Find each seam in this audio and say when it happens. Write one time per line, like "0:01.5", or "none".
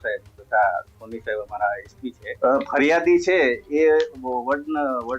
0:02.3